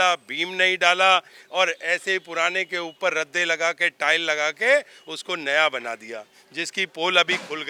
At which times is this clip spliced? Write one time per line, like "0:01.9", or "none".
none